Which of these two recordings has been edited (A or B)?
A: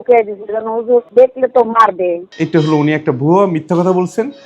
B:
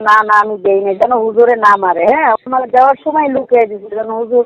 A